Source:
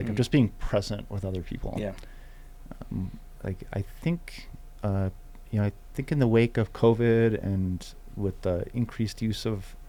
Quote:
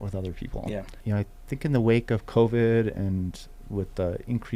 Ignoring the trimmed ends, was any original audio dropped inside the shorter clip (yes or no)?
yes